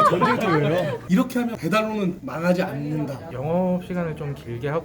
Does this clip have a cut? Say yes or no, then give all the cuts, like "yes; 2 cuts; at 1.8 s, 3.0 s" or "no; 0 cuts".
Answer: yes; 2 cuts; at 1.0 s, 3.2 s